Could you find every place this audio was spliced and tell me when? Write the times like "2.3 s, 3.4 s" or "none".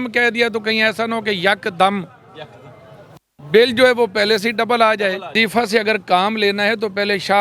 5.3 s